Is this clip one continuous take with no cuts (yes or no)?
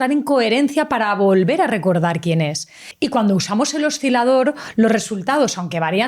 yes